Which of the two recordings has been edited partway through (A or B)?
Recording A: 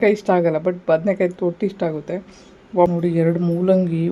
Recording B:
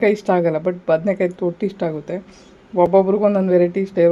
A